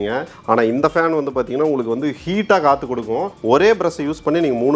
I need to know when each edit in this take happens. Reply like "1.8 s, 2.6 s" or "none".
3.4 s